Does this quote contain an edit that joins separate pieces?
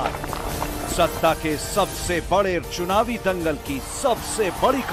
no; 0 cuts

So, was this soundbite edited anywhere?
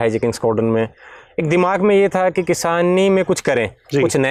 no; 0 cuts

